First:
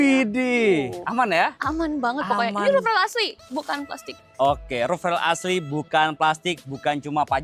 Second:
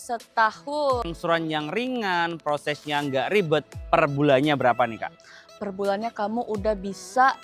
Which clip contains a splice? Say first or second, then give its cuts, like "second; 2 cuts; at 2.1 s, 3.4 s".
second; 1 cut; at 1.0 s